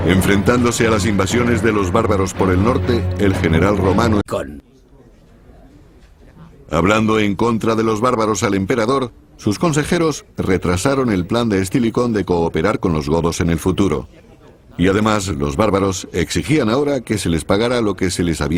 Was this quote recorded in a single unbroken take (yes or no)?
yes